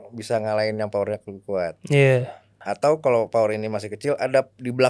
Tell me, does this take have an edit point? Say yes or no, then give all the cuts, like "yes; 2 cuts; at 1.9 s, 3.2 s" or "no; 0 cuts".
yes; 1 cut; at 2.6 s